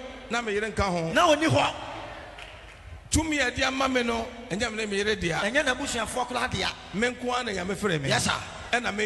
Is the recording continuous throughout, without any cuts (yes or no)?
yes